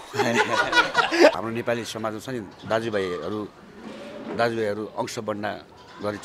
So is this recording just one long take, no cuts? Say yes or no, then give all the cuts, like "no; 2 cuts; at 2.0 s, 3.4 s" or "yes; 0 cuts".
no; 1 cut; at 1.3 s